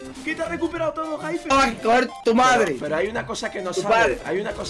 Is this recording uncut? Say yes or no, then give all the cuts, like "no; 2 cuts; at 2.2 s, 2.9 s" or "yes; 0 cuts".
no; 1 cut; at 1.5 s